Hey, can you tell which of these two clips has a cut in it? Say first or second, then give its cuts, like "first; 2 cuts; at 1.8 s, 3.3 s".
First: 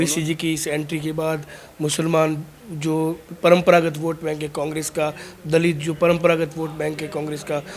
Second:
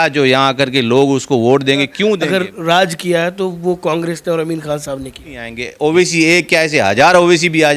second; 2 cuts; at 2.2 s, 5.6 s